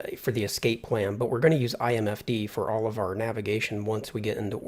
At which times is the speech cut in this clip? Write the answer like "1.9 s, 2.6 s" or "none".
none